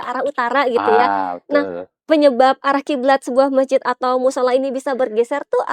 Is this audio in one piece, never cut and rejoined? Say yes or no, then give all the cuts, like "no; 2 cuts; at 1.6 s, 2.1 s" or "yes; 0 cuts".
yes; 0 cuts